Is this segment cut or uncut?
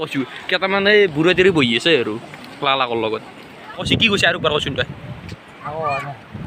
cut